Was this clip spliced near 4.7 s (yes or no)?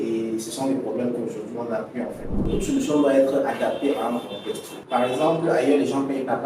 yes